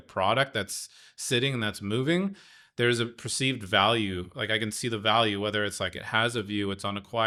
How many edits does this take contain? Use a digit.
0